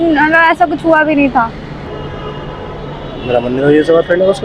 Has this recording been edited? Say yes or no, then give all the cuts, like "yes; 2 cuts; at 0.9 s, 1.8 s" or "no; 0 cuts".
yes; 1 cut; at 1.9 s